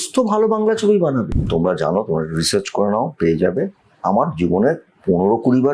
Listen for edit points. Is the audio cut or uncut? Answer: cut